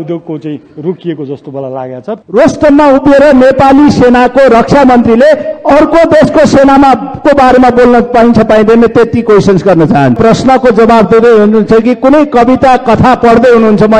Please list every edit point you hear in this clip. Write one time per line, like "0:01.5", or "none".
0:02.2
0:10.2